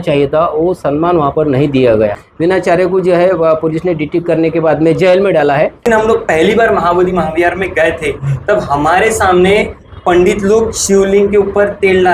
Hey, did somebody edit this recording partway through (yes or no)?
yes